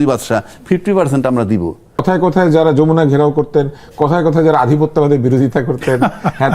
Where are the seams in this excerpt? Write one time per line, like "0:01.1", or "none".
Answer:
0:02.0

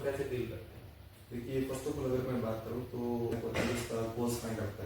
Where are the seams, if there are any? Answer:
0:03.3

